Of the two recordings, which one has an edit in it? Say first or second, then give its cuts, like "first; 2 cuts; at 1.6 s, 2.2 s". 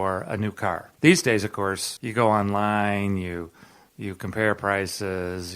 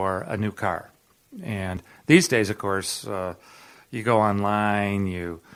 first; 2 cuts; at 0.9 s, 1.9 s